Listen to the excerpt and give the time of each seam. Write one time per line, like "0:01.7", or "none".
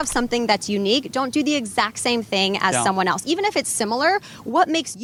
none